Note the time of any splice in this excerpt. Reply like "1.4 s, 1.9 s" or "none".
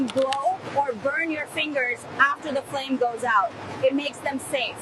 none